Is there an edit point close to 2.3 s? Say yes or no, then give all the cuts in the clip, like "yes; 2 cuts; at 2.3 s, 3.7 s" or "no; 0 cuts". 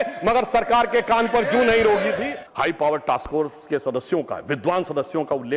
yes; 1 cut; at 2.3 s